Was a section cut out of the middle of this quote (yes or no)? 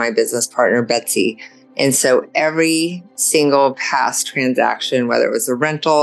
no